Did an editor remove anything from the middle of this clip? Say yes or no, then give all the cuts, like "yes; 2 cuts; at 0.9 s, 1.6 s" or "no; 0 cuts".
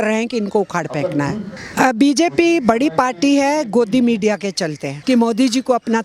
yes; 2 cuts; at 1.5 s, 4.9 s